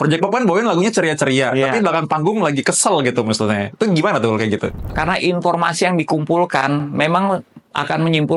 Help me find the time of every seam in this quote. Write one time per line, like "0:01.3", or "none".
0:05.0